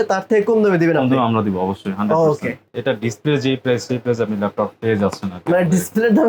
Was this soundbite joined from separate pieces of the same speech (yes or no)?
yes